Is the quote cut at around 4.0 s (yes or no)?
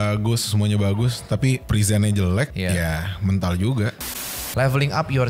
yes